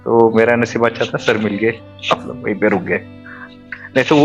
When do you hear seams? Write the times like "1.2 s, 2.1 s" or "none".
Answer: none